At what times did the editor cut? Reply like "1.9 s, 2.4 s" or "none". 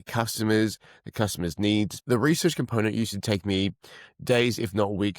2.0 s